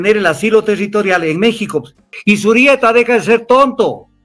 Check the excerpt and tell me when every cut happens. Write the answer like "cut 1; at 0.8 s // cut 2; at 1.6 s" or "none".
cut 1; at 2.1 s